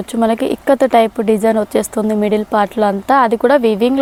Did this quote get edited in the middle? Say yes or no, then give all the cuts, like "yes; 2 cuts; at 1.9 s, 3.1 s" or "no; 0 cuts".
no; 0 cuts